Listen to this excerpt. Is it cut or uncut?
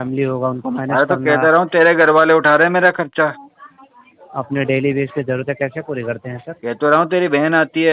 uncut